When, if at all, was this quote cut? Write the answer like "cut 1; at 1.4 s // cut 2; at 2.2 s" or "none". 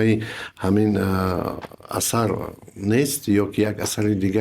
none